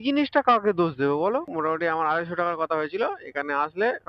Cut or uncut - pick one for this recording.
cut